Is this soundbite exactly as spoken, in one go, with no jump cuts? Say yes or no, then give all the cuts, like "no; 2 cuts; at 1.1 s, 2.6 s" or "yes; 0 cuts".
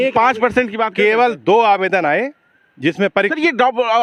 yes; 0 cuts